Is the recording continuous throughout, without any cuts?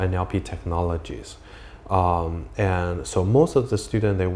yes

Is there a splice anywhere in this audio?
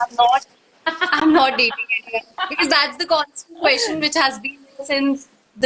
no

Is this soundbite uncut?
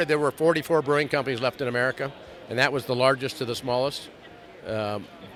yes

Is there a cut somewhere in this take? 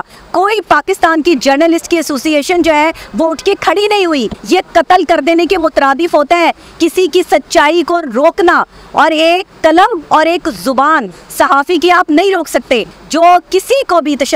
yes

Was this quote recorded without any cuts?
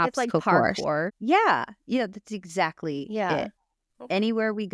no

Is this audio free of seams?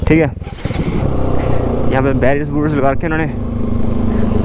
no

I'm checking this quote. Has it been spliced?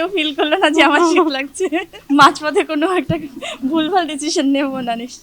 yes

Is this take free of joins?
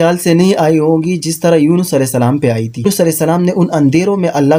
yes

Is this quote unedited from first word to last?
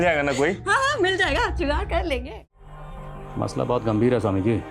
no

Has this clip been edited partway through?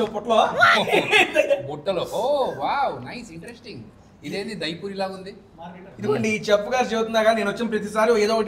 no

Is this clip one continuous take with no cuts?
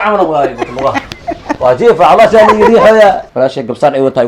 no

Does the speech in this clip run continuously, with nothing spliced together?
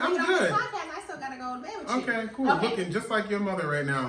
yes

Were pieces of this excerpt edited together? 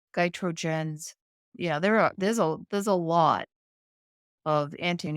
yes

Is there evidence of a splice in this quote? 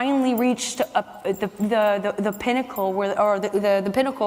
no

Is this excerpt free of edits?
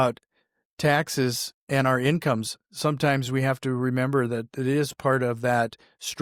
yes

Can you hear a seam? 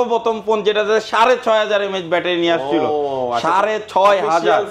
no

